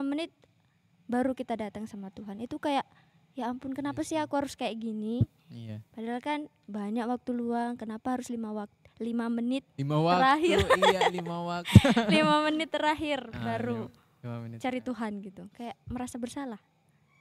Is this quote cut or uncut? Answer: uncut